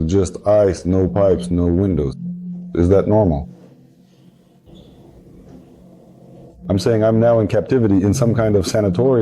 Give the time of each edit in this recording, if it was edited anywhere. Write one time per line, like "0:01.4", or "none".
none